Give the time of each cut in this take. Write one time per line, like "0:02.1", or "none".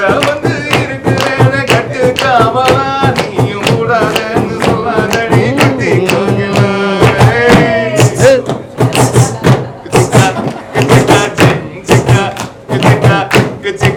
none